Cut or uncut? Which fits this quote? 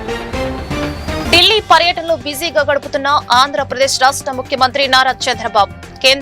cut